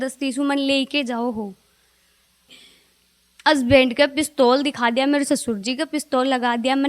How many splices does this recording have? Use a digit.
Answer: 1